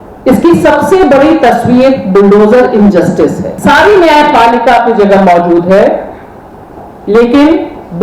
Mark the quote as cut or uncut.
cut